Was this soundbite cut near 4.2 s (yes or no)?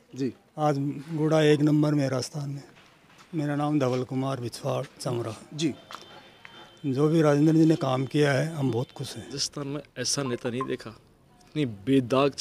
no